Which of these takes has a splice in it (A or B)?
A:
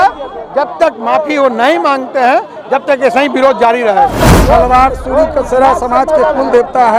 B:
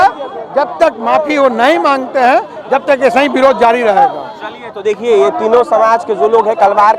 A